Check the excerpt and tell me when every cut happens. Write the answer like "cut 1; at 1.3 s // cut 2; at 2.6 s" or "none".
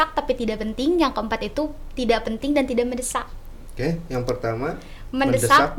none